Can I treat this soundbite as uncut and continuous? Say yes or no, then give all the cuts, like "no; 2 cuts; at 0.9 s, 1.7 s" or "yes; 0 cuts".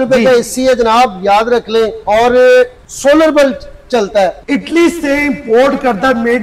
no; 3 cuts; at 2.0 s, 2.8 s, 4.4 s